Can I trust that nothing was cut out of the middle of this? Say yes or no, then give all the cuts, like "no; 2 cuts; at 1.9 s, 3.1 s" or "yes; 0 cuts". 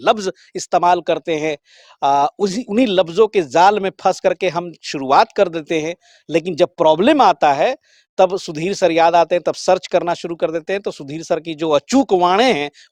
yes; 0 cuts